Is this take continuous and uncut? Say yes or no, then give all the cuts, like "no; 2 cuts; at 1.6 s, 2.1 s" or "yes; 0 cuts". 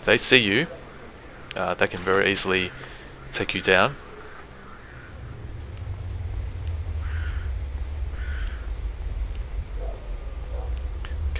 no; 1 cut; at 5.5 s